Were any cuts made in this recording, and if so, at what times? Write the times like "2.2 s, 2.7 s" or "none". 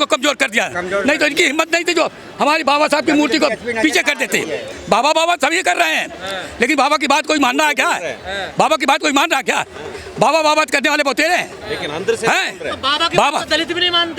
4.7 s